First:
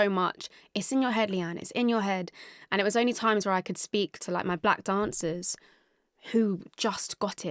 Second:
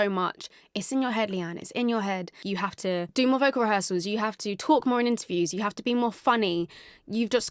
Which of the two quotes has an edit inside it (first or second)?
second